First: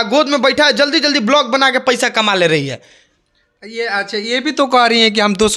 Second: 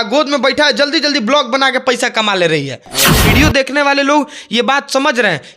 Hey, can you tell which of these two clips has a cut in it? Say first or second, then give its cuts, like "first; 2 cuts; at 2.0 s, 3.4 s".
second; 1 cut; at 3.2 s